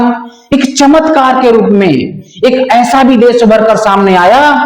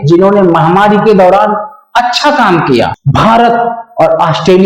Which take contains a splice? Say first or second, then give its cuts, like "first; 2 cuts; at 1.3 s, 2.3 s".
second; 1 cut; at 3.0 s